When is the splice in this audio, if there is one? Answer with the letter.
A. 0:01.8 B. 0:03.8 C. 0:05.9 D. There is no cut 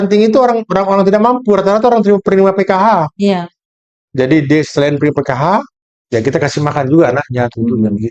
D